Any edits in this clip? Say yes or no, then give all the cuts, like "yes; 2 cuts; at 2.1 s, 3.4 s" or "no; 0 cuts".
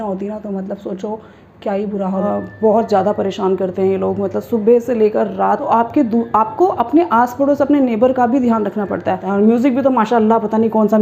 yes; 3 cuts; at 2.2 s, 5.6 s, 9.2 s